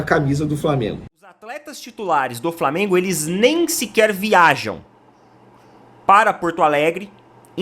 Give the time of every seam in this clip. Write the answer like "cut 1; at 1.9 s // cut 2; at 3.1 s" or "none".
cut 1; at 1.3 s

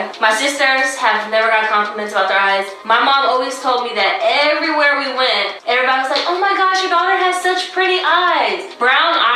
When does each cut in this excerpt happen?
cut 1; at 1.4 s // cut 2; at 8.3 s

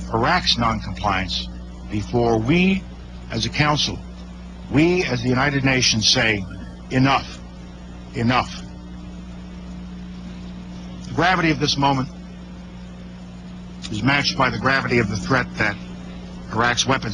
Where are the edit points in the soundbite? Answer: none

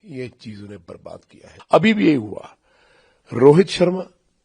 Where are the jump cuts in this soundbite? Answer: cut 1; at 1.5 s

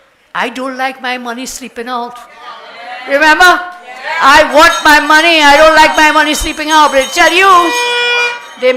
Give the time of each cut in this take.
none

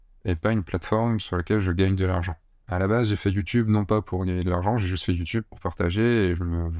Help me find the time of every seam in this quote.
none

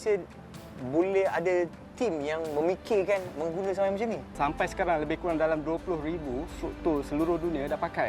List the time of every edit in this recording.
cut 1; at 4.3 s

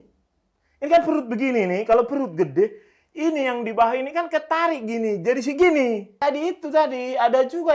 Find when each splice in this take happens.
cut 1; at 6.1 s

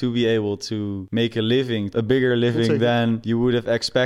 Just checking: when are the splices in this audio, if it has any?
cut 1; at 1.0 s // cut 2; at 1.9 s // cut 3; at 3.2 s

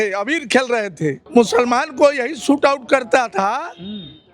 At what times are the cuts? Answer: cut 1; at 1.2 s

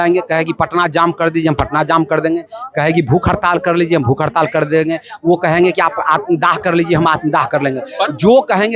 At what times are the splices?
none

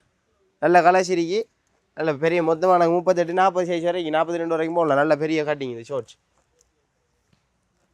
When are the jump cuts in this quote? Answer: none

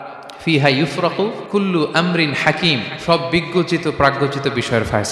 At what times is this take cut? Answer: cut 1; at 1.4 s

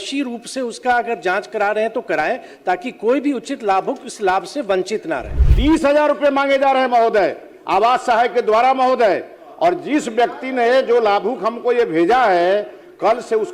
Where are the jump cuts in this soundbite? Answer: cut 1; at 5.2 s

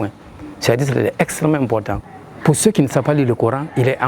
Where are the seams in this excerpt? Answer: cut 1; at 2.0 s

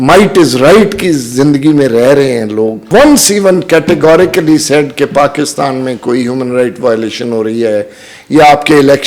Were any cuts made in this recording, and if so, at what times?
cut 1; at 2.8 s

